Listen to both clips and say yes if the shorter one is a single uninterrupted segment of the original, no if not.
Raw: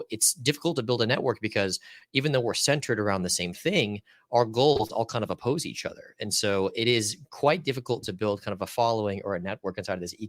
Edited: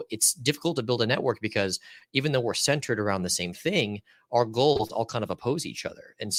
yes